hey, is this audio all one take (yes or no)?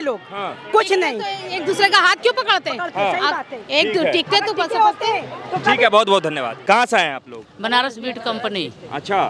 yes